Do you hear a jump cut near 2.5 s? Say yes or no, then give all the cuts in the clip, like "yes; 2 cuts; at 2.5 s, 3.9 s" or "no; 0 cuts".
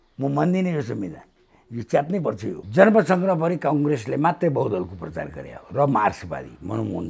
yes; 1 cut; at 2.5 s